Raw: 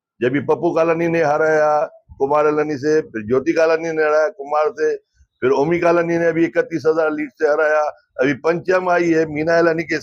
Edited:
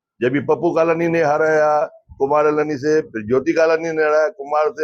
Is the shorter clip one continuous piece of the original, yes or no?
yes